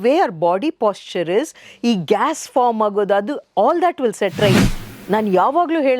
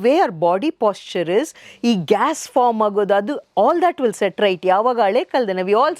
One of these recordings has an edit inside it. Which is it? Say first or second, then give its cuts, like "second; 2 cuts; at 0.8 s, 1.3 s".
first; 1 cut; at 4.6 s